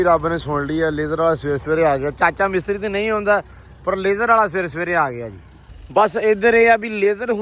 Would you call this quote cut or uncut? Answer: uncut